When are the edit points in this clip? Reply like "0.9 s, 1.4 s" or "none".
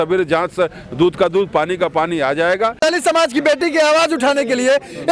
2.8 s